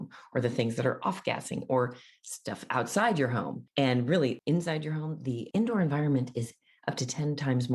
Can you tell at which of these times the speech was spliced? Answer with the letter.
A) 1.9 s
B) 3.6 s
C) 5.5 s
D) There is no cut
B